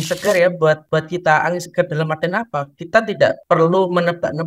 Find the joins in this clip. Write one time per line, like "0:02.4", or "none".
0:00.8
0:03.4